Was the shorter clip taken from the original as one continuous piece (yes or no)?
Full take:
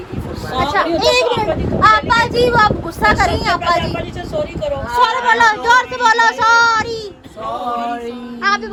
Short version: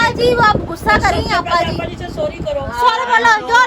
yes